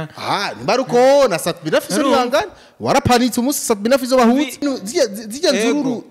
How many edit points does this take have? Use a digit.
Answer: 1